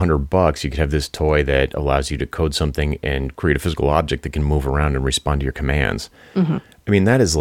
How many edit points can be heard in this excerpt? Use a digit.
1